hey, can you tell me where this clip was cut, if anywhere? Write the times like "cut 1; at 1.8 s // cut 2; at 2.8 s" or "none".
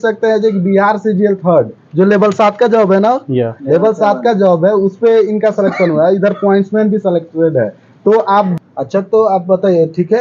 cut 1; at 8.5 s